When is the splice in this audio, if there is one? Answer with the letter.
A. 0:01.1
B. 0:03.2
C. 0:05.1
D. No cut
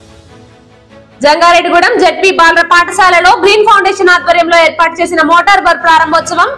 D